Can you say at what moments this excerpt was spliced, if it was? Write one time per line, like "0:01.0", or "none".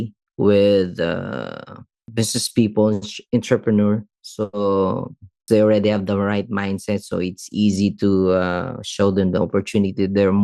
0:02.1
0:05.4

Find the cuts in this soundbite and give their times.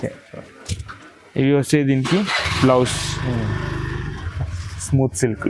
none

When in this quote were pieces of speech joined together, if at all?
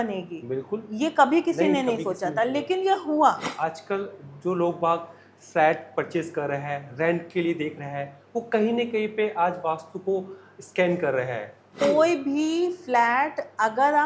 0:03.5
0:11.8

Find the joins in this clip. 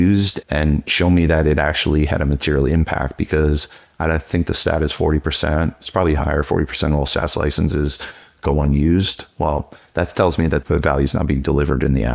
0:10.6

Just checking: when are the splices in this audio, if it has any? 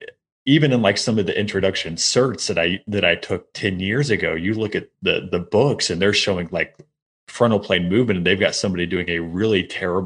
none

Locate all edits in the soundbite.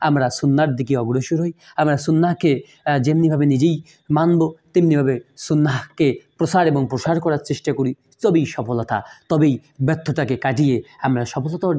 none

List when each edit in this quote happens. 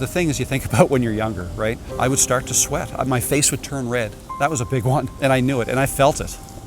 0:01.9
0:05.1

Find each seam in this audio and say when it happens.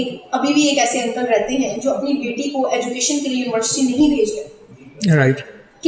none

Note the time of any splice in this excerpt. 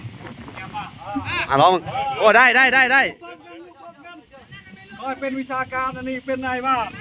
none

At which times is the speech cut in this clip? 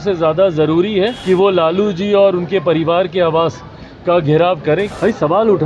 0:01.2
0:04.9

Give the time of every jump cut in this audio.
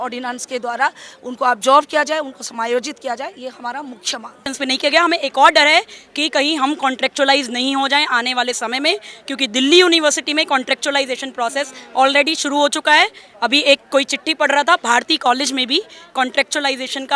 0:04.5

